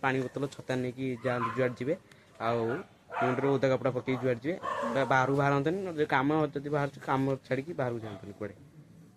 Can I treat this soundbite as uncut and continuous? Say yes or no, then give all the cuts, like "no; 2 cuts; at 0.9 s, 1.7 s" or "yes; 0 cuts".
yes; 0 cuts